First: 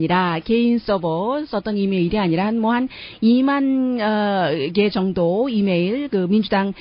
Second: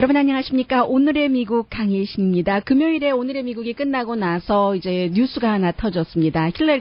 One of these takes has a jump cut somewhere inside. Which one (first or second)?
second